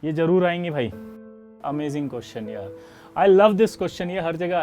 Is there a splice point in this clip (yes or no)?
yes